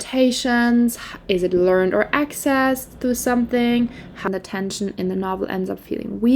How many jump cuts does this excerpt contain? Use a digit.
1